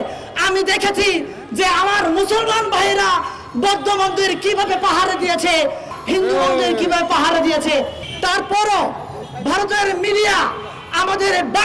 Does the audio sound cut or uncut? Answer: cut